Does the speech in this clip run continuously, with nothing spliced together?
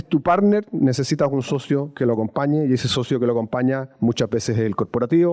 yes; 0 cuts

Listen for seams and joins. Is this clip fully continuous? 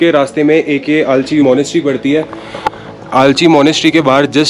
no; 1 cut; at 1.4 s

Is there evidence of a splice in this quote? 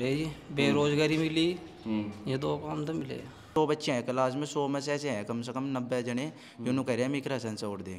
yes; 1 cut; at 3.5 s

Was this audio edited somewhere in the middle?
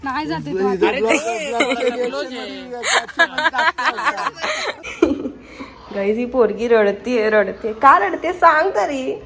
yes; 1 cut; at 4.8 s

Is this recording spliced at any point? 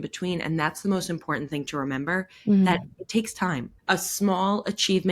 yes; 1 cut; at 3.7 s

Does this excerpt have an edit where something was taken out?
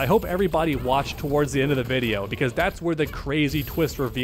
no; 0 cuts

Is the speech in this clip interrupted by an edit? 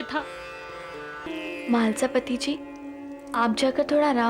yes; 1 cut; at 1.3 s

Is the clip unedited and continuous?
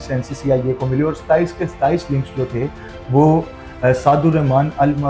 yes; 0 cuts

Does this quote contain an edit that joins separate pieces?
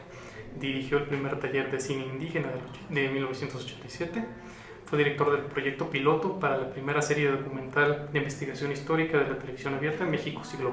no; 0 cuts

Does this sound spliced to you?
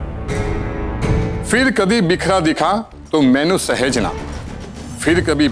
yes; 2 cuts; at 1.4 s, 4.3 s

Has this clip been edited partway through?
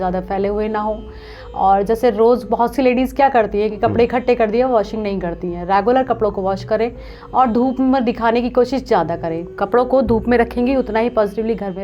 no; 0 cuts

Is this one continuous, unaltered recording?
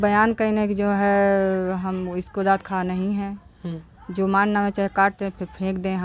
yes; 0 cuts

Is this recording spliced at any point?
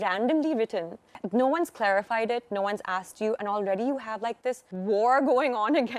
yes; 2 cuts; at 1.1 s, 4.7 s

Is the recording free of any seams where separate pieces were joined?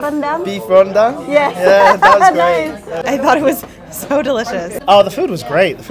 no; 2 cuts; at 3.0 s, 4.7 s

